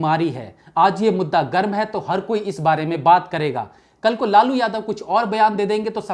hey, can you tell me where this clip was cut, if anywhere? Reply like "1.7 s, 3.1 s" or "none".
none